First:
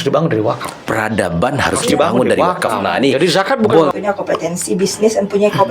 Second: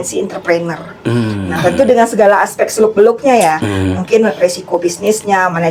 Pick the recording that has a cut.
first; 1 cut; at 3.9 s

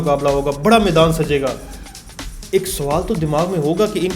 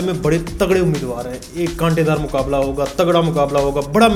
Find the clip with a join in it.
first; 1 cut; at 2.1 s

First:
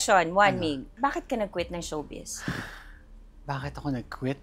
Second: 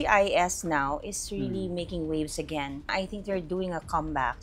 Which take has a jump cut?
second; 1 cut; at 2.9 s

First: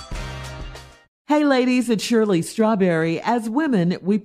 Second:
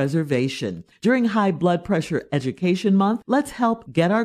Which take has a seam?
first; 1 cut; at 1.0 s

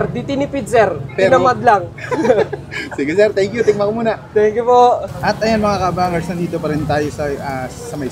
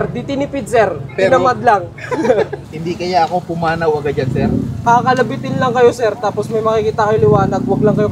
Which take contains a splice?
second; 2 cuts; at 2.7 s, 4.8 s

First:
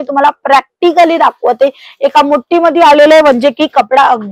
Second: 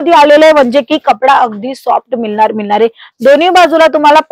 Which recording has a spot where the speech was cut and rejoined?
second; 1 cut; at 3.1 s

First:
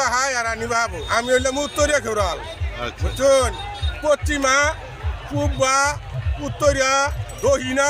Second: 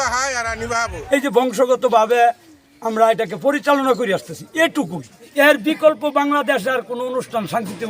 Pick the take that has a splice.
second; 2 cuts; at 1.0 s, 5.1 s

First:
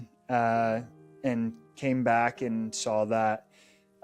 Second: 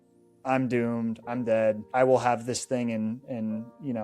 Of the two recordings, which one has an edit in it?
second; 1 cut; at 1.8 s

